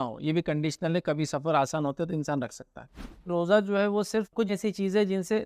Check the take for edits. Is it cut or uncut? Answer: cut